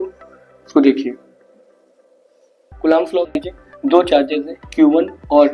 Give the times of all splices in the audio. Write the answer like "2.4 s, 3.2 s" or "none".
2.7 s, 3.3 s